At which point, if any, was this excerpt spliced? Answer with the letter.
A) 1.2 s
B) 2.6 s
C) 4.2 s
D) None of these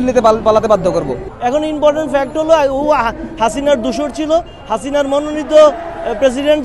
A